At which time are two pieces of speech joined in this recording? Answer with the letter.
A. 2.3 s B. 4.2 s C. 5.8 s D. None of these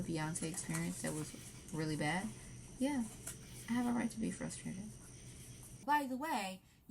C